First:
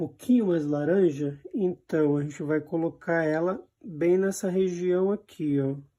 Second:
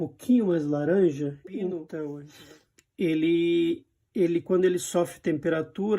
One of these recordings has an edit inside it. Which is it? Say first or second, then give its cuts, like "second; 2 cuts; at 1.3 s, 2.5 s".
second; 1 cut; at 2.3 s